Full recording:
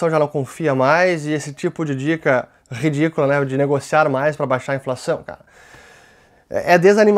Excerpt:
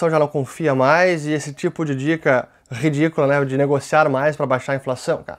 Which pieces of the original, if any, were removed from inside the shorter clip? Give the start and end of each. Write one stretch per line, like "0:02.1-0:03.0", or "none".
none